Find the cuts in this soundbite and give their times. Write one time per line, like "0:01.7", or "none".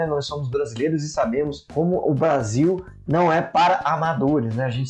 0:01.6